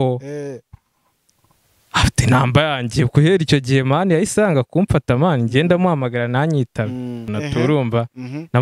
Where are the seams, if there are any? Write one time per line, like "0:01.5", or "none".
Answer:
0:07.2